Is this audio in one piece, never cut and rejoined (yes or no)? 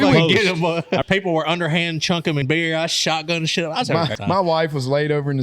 no